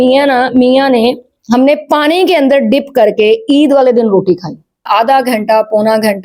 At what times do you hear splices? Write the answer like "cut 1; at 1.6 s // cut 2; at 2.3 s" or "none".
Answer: cut 1; at 4.8 s